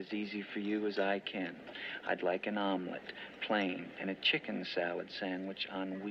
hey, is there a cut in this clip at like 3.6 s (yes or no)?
no